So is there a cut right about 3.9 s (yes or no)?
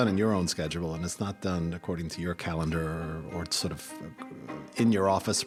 no